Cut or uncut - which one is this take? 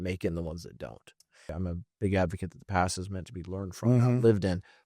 cut